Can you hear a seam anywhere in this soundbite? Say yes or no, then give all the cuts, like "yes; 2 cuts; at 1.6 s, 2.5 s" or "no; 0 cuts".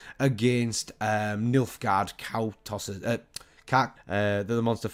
no; 0 cuts